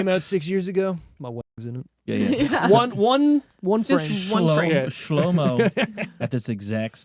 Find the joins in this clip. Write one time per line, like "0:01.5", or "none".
none